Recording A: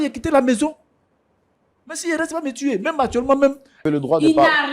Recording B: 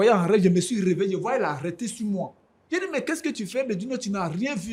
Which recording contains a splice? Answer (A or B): A